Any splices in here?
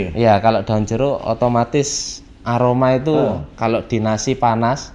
no; 0 cuts

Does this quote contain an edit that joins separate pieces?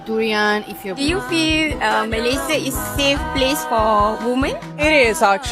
yes; 1 cut; at 1.0 s

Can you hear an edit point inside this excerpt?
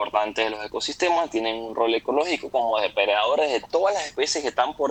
no; 0 cuts

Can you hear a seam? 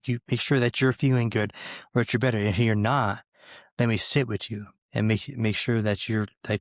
no; 0 cuts

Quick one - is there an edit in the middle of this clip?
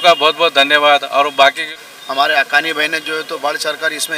yes; 1 cut; at 1.7 s

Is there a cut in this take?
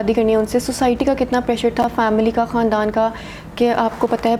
no; 0 cuts

